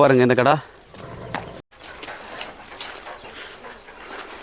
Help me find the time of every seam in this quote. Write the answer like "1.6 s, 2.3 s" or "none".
1.6 s